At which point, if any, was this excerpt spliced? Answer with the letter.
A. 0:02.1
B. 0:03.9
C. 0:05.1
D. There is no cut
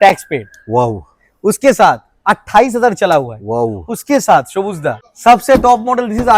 C